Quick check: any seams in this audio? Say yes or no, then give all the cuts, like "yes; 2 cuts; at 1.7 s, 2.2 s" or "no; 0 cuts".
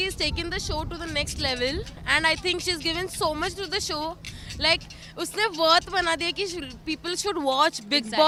no; 0 cuts